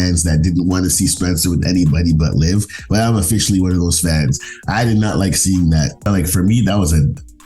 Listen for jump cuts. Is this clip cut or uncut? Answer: cut